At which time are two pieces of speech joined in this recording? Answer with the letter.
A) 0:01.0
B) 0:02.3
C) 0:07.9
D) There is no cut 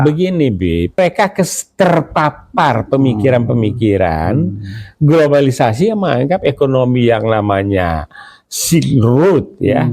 A